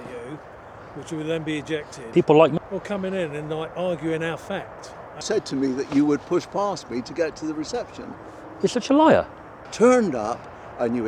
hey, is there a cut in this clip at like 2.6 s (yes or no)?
yes